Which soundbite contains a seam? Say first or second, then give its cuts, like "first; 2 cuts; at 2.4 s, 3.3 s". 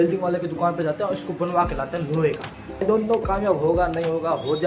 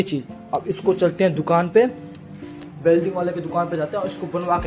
first; 1 cut; at 2.8 s